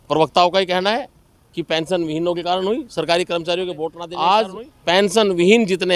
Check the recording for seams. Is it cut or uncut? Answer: cut